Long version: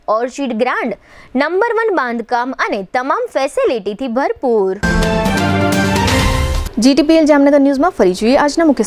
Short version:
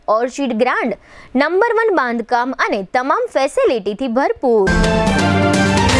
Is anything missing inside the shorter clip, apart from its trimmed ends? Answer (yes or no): yes